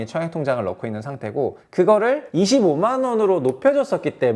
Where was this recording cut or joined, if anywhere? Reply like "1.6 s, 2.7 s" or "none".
1.6 s, 2.3 s